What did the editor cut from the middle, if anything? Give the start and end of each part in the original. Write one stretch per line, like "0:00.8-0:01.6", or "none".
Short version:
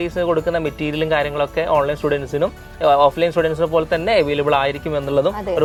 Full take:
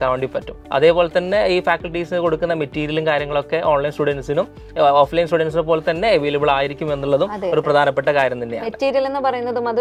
none